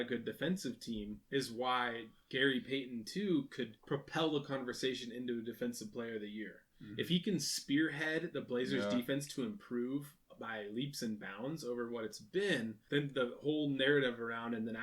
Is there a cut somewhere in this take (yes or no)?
yes